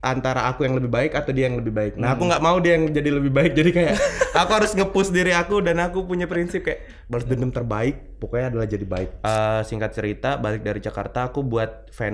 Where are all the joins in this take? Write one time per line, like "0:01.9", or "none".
0:09.1